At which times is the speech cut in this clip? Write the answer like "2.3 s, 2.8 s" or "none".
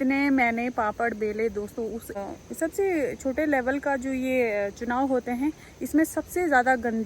2.2 s